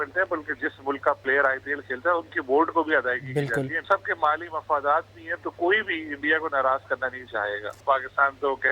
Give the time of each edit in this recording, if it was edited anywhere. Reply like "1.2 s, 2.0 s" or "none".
1.2 s, 3.9 s, 7.8 s